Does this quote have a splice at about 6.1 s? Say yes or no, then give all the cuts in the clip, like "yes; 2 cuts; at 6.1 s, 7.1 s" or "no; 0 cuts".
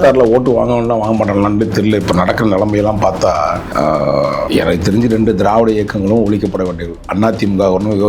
no; 2 cuts; at 3.7 s, 4.5 s